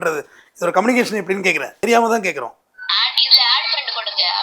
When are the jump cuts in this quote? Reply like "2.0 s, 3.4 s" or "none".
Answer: 1.8 s, 2.7 s